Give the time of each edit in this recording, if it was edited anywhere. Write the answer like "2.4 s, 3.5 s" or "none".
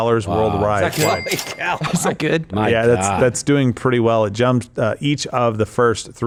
none